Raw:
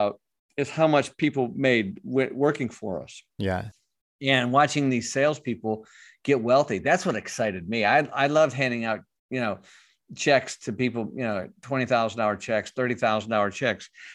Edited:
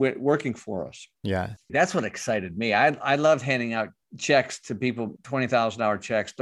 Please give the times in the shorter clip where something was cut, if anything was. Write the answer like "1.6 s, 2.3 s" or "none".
1.7 s, 4.0 s, 5.2 s